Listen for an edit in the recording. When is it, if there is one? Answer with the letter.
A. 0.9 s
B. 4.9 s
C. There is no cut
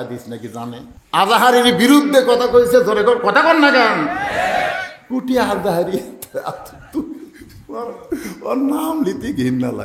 A